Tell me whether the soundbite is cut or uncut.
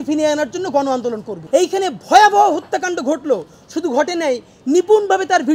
cut